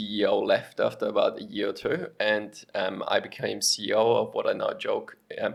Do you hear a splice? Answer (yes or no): no